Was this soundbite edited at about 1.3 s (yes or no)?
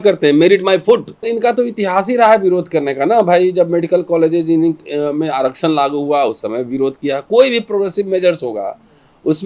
yes